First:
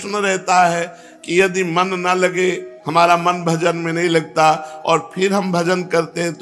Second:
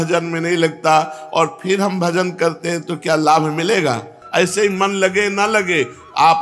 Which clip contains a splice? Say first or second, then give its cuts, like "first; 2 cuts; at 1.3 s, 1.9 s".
second; 1 cut; at 4.2 s